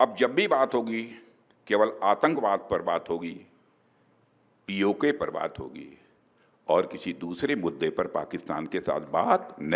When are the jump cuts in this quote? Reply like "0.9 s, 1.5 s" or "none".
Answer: none

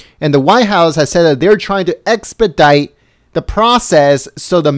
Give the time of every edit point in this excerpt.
1.2 s

